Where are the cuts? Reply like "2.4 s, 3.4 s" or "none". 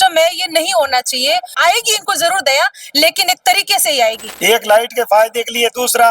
1.6 s, 4.3 s